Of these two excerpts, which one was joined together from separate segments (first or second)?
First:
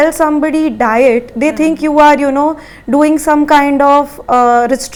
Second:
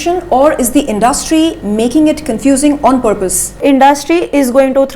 second